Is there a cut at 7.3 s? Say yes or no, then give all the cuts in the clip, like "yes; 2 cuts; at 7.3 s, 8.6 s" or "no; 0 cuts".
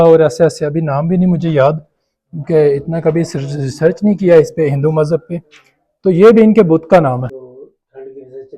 yes; 1 cut; at 7.3 s